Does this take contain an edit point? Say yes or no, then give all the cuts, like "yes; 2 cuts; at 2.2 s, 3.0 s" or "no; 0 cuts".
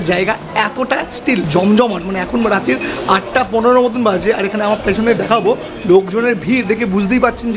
no; 0 cuts